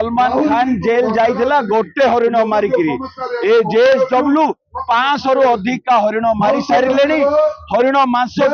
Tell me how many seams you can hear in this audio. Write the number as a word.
zero